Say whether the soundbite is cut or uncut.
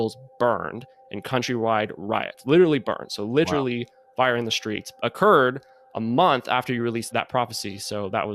cut